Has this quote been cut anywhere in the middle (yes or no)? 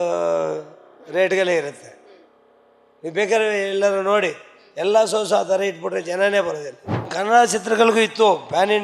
yes